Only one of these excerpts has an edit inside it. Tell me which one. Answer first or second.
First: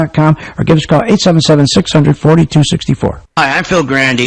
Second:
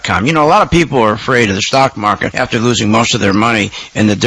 first